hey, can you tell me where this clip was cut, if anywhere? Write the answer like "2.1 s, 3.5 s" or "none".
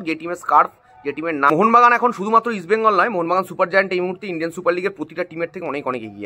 1.5 s

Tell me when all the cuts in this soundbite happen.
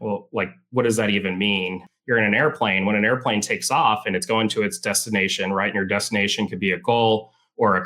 1.8 s

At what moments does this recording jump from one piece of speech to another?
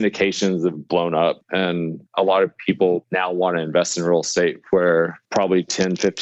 1.6 s, 3.1 s, 5.2 s

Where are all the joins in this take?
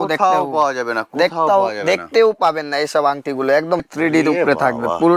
3.8 s

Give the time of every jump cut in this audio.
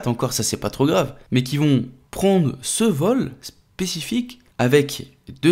1.6 s, 4.4 s

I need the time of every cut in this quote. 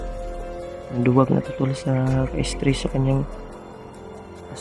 0.9 s

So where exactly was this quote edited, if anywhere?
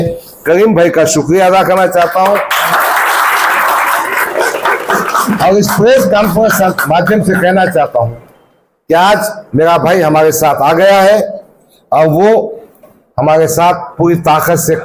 none

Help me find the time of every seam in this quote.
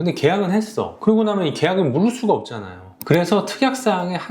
0.9 s

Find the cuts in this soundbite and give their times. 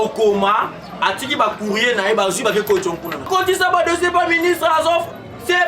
3.3 s

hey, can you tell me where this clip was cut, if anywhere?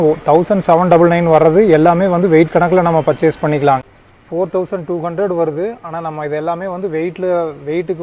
3.8 s

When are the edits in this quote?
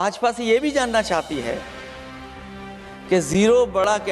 none

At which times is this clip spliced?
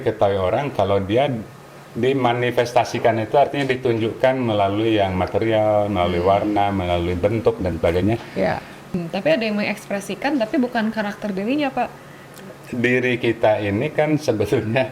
9.0 s, 12.5 s

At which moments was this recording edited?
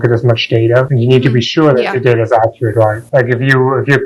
0.9 s, 3.0 s

